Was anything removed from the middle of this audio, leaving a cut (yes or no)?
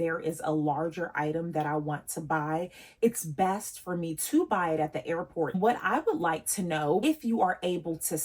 yes